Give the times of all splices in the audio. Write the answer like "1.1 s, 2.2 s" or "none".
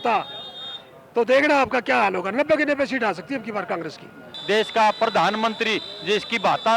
4.3 s

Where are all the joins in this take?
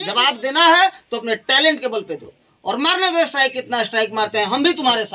none

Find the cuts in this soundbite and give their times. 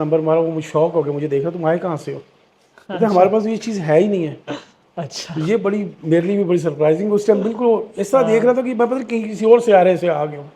none

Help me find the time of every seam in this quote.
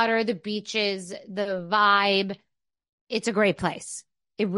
none

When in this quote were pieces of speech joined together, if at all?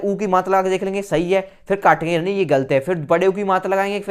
none

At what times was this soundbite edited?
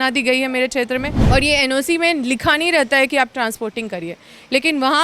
1.1 s

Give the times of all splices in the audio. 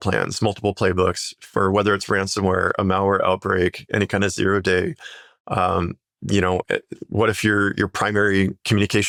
none

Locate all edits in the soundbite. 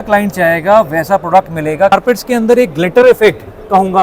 1.9 s

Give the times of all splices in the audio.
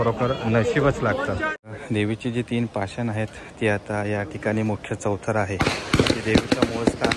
1.6 s

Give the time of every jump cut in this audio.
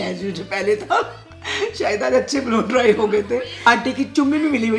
3.7 s

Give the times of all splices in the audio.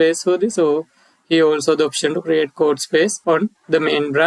3.2 s

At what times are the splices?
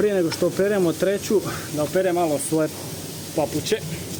none

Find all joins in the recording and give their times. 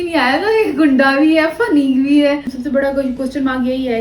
2.5 s

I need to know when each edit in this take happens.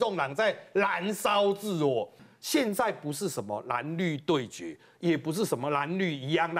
2.2 s

